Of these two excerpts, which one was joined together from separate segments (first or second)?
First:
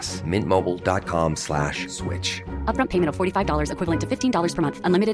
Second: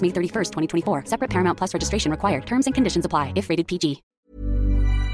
second